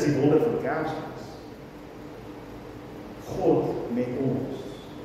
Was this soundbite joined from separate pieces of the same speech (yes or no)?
no